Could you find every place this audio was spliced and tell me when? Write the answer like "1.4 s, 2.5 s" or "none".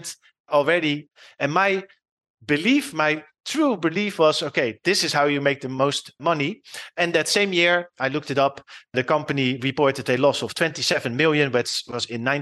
1.1 s, 5.7 s